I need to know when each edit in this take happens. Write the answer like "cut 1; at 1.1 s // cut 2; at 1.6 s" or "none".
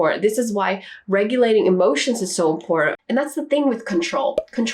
cut 1; at 2.9 s